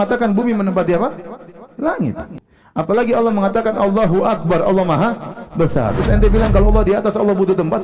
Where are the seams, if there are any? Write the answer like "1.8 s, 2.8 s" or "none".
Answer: 2.3 s